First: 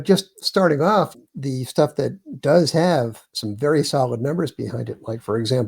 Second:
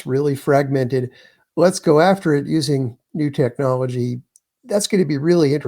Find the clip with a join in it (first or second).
first